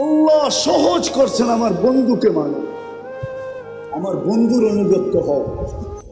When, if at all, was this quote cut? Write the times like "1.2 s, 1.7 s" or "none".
2.7 s, 3.9 s